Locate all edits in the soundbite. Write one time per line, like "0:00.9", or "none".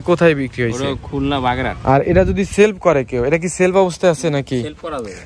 0:01.7